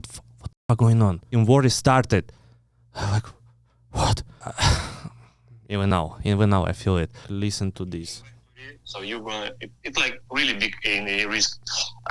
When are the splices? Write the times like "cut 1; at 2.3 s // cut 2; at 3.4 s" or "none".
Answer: cut 1; at 1.3 s // cut 2; at 4.4 s // cut 3; at 7.3 s

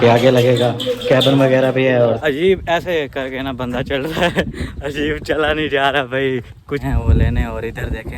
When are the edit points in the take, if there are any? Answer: cut 1; at 2.2 s // cut 2; at 6.8 s

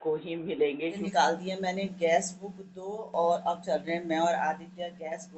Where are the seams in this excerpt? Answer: cut 1; at 1.0 s

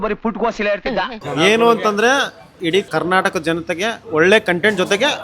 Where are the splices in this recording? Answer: cut 1; at 1.2 s // cut 2; at 2.8 s // cut 3; at 4.0 s

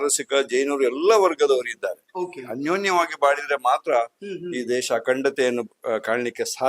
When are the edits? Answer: none

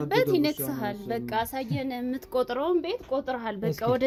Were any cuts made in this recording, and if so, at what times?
none

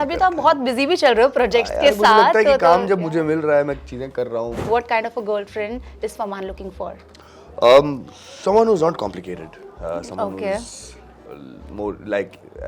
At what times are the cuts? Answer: cut 1; at 4.6 s

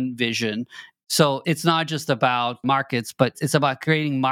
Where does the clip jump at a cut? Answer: cut 1; at 1.2 s // cut 2; at 2.6 s

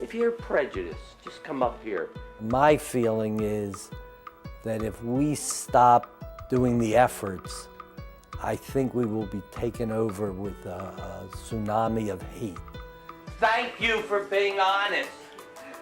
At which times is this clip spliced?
cut 1; at 2.2 s

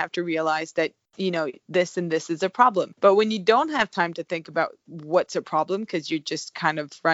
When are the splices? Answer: none

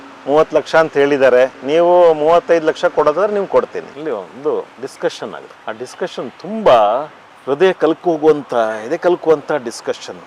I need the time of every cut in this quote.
cut 1; at 3.8 s

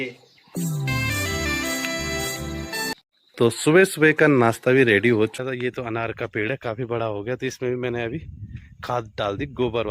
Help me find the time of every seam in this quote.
cut 1; at 2.9 s // cut 2; at 5.4 s

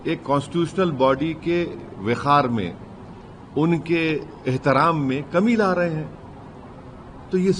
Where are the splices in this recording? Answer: none

